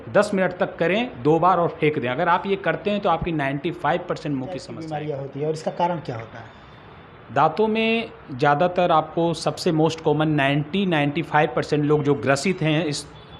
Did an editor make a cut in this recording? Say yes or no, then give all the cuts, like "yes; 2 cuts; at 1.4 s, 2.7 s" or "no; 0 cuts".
yes; 1 cut; at 4.8 s